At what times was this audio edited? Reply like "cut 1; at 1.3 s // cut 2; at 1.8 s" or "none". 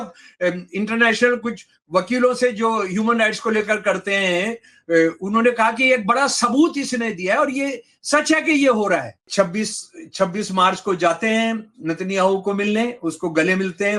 cut 1; at 9.3 s